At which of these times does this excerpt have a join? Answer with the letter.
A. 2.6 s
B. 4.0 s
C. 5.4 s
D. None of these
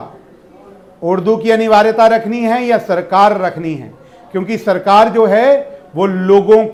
D